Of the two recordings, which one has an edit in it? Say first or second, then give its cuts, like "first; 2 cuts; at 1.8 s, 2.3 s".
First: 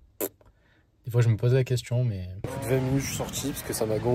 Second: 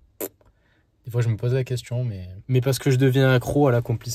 first; 1 cut; at 2.5 s